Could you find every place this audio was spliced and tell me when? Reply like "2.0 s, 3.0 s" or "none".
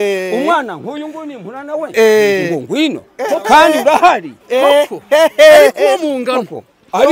none